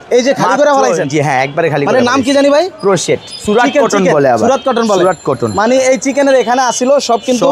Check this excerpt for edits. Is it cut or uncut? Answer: uncut